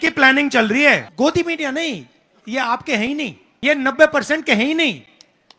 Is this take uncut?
no; 2 cuts; at 1.1 s, 3.4 s

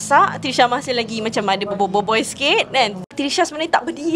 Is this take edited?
yes; 1 cut; at 3.0 s

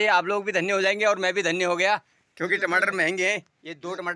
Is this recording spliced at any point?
no; 0 cuts

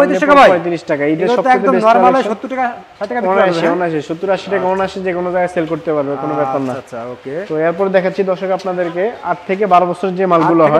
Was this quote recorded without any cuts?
yes; 0 cuts

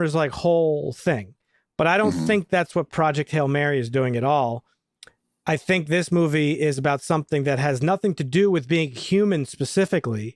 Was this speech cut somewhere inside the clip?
no; 0 cuts

